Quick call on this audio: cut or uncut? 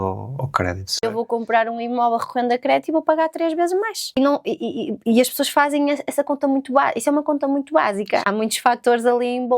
cut